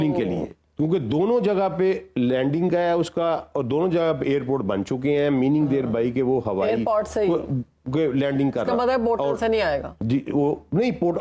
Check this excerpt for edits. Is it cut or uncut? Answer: uncut